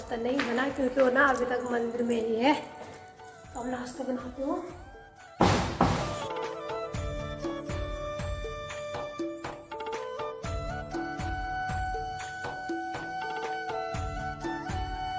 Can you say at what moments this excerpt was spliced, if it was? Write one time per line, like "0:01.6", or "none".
none